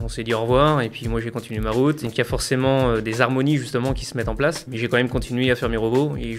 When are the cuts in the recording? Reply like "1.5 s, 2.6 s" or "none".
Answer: 2.0 s, 4.7 s